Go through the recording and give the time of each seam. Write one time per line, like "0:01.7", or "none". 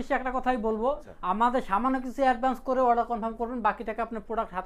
0:01.1